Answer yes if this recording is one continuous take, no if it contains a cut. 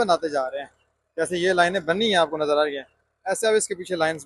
yes